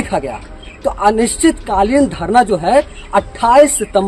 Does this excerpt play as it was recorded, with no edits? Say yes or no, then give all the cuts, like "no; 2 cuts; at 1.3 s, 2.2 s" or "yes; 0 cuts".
yes; 0 cuts